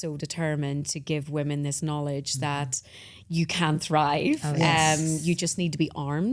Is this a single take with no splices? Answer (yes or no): yes